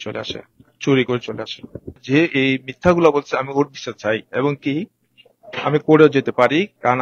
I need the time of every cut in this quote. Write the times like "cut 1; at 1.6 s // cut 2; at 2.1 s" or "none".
cut 1; at 2.0 s